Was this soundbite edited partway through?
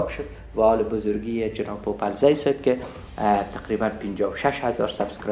no; 0 cuts

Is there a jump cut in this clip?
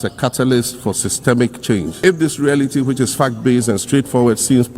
yes; 1 cut; at 1.9 s

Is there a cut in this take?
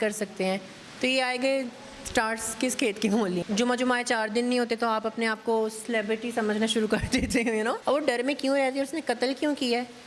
yes; 2 cuts; at 3.4 s, 7.8 s

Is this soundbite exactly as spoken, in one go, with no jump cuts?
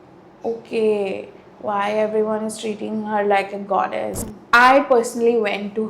no; 1 cut; at 4.1 s

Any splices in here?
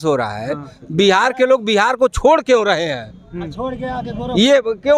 no; 0 cuts

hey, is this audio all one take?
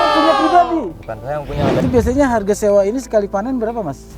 no; 1 cut; at 1.8 s

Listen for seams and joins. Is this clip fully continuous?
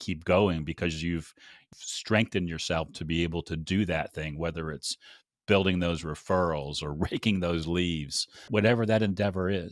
no; 2 cuts; at 1.7 s, 8.5 s

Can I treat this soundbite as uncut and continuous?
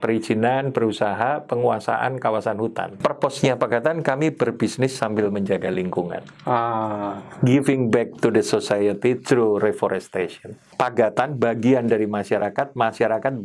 no; 3 cuts; at 2.9 s, 7.2 s, 10.7 s

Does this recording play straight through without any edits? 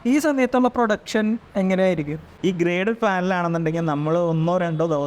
no; 1 cut; at 2.2 s

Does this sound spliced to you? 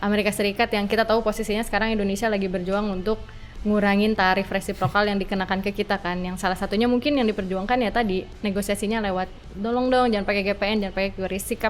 no; 0 cuts

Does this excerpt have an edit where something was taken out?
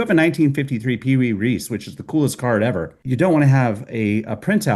yes; 1 cut; at 3.0 s

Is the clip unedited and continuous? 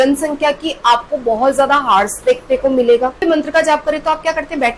no; 1 cut; at 3.2 s

